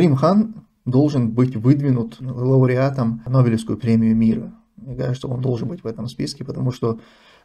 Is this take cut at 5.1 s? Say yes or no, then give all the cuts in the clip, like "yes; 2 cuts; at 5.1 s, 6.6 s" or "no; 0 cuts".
no; 1 cut; at 3.2 s